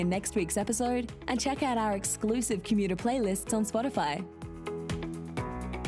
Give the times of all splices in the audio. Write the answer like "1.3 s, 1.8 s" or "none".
4.4 s